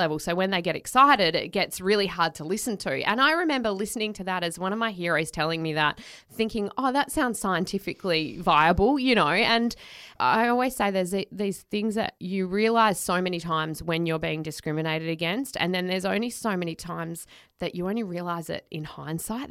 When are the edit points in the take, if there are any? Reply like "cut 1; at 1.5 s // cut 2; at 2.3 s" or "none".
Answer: cut 1; at 10.1 s // cut 2; at 12.2 s